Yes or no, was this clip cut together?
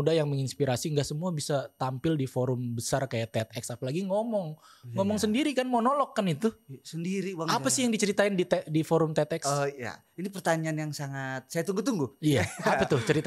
no